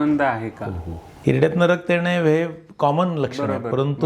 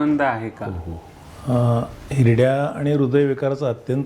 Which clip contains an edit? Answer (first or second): first